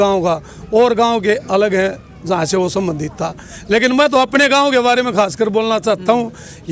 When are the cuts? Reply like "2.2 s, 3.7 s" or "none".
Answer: none